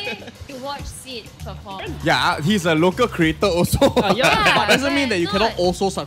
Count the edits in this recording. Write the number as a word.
one